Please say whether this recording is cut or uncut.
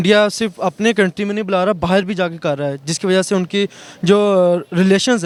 uncut